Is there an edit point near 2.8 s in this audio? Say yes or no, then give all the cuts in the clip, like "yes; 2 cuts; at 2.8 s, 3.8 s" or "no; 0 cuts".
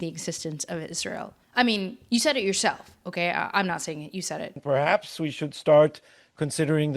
no; 2 cuts; at 1.4 s, 4.6 s